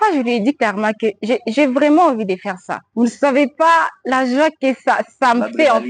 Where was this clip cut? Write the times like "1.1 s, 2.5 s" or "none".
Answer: 2.8 s